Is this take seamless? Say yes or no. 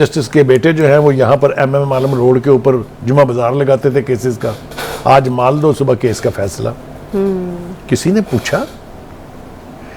yes